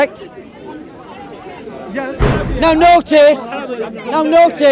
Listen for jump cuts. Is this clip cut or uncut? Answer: cut